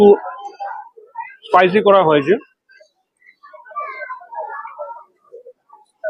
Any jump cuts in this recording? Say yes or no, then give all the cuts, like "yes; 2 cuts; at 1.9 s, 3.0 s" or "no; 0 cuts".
no; 0 cuts